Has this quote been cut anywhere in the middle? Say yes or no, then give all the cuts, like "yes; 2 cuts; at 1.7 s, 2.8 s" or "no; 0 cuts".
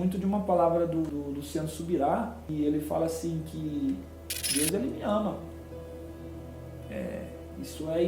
yes; 2 cuts; at 1.1 s, 2.4 s